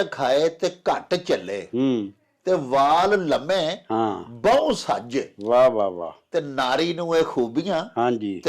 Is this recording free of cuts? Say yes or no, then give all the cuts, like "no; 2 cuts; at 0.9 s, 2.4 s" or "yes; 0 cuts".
yes; 0 cuts